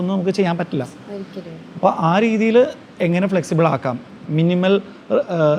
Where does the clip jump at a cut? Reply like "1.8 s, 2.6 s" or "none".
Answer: 4.2 s